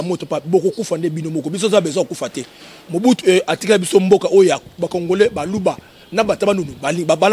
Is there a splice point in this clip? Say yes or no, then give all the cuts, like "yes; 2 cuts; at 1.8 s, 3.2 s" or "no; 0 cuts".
no; 0 cuts